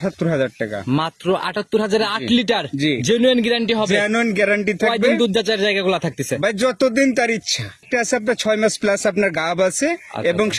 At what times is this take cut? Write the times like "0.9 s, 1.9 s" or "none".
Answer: 7.8 s